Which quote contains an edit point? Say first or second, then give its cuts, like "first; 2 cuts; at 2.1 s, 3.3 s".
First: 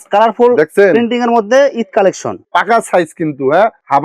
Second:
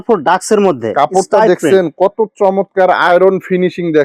first; 1 cut; at 2.4 s